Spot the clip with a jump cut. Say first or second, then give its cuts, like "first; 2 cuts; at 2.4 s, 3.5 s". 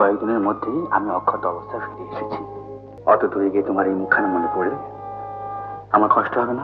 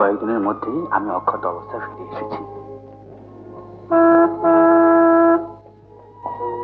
first; 1 cut; at 2.9 s